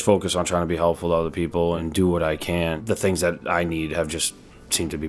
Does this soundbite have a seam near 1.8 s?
yes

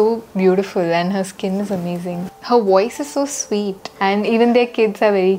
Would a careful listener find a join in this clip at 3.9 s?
yes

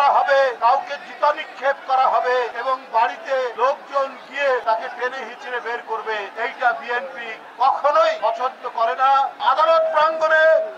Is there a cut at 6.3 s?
yes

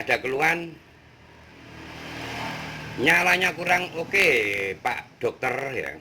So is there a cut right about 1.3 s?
no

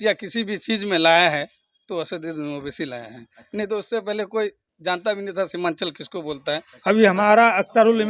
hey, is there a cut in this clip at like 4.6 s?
no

